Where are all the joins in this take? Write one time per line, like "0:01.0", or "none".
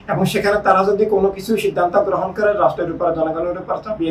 none